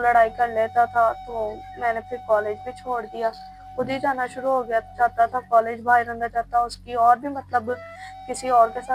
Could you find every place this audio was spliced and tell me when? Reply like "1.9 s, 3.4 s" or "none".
none